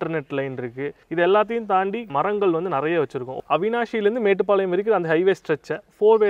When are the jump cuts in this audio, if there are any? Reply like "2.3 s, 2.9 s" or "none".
1.0 s, 2.1 s, 3.4 s